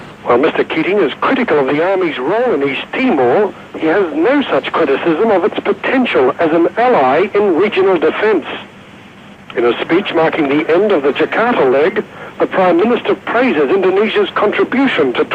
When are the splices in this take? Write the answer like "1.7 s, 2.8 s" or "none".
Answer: 8.0 s